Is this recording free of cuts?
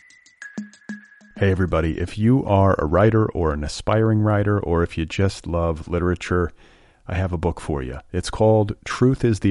no; 1 cut; at 0.9 s

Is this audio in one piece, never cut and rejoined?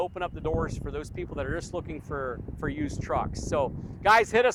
yes; 0 cuts

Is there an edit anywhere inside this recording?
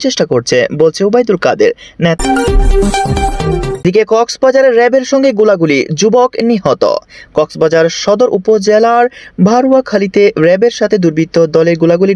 yes; 2 cuts; at 2.2 s, 3.8 s

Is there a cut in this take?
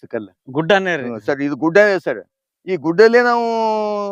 no; 0 cuts

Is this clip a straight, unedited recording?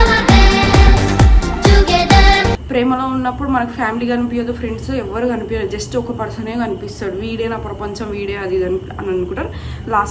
no; 1 cut; at 2.6 s

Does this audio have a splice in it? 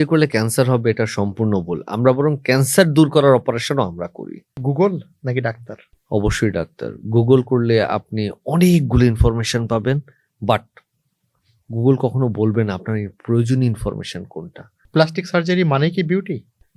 yes; 2 cuts; at 4.6 s, 14.8 s

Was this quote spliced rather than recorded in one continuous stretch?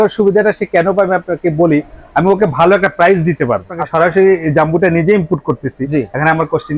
yes; 1 cut; at 3.8 s

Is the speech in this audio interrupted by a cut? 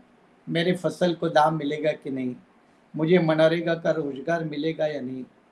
no; 0 cuts

